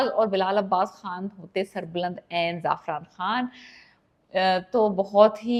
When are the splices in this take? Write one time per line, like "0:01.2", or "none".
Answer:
none